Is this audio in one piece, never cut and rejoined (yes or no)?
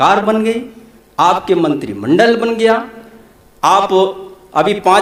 yes